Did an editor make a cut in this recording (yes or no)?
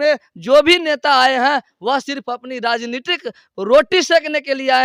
no